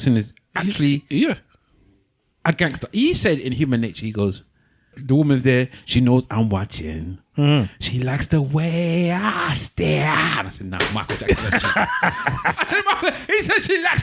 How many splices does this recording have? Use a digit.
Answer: 1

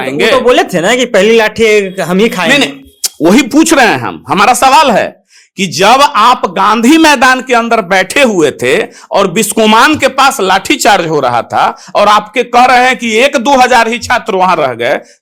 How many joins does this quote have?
0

